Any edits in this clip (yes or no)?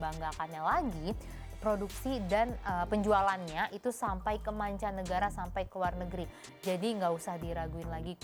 no